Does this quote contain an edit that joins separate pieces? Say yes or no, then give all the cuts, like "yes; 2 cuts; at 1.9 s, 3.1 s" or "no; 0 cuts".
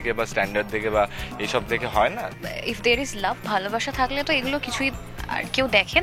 yes; 1 cut; at 2.4 s